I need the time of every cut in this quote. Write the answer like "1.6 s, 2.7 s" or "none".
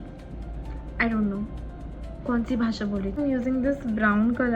3.1 s